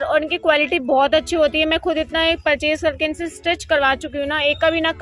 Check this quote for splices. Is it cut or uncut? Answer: uncut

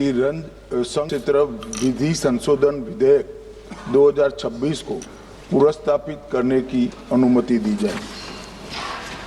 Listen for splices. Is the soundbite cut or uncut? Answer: cut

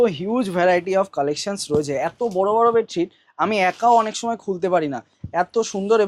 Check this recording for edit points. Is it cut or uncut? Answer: uncut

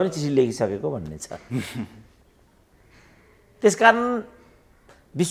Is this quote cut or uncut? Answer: uncut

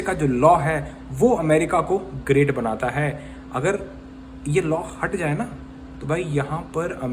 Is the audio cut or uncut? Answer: uncut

